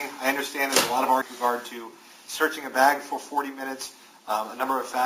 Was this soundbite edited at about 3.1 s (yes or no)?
no